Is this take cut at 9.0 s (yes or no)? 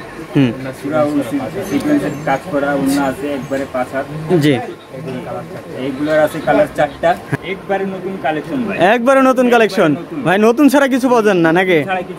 no